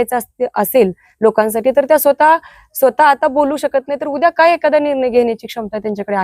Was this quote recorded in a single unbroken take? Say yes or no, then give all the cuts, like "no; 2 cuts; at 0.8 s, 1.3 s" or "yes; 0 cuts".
yes; 0 cuts